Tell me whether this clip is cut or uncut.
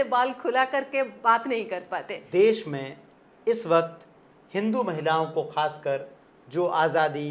cut